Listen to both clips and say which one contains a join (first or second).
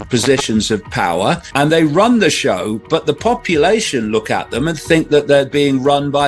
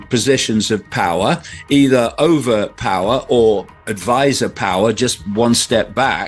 first